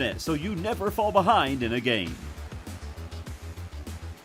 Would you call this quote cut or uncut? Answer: uncut